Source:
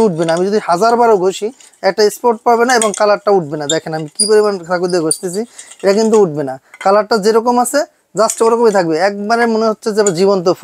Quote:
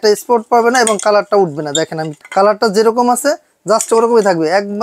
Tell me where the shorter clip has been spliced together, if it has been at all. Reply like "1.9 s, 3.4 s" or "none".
2.1 s